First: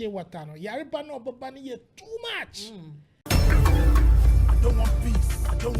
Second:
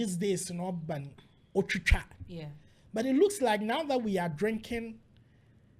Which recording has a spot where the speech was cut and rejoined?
first; 1 cut; at 3.1 s

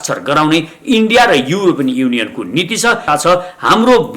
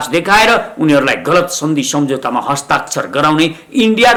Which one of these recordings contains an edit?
first; 1 cut; at 3.0 s

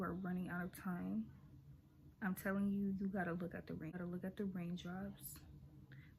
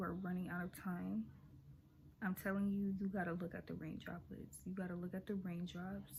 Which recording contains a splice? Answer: first; 1 cut; at 3.9 s

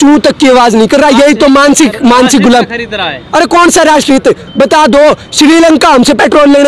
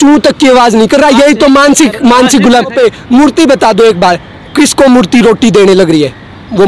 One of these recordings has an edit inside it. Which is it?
second; 1 cut; at 2.7 s

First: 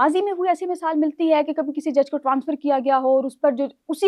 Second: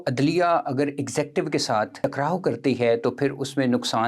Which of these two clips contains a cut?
second; 1 cut; at 2.0 s

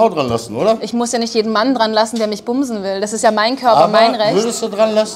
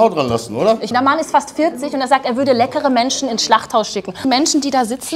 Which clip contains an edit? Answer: second; 2 cuts; at 0.9 s, 4.3 s

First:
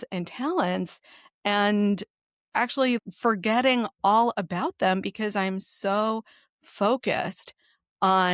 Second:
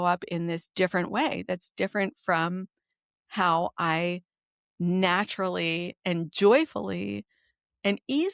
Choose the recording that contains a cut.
first; 1 cut; at 3.0 s

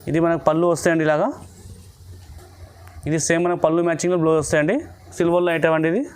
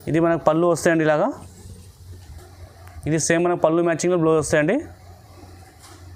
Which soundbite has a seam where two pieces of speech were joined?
first; 1 cut; at 5.1 s

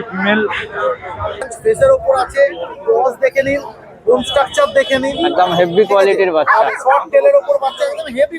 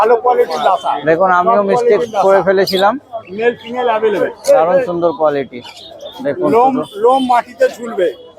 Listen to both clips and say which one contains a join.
first; 1 cut; at 1.5 s

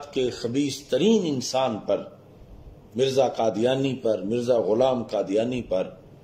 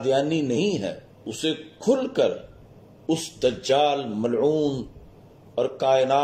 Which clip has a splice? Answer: second; 1 cut; at 1.2 s

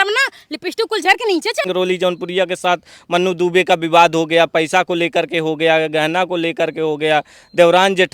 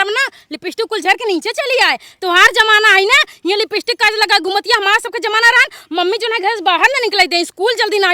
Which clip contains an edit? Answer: first; 1 cut; at 1.6 s

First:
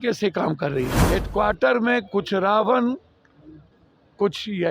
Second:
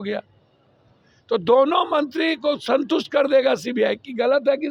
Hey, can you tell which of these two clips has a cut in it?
first; 1 cut; at 1.0 s

